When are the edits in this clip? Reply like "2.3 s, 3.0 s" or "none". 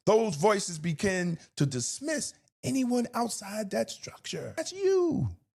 4.6 s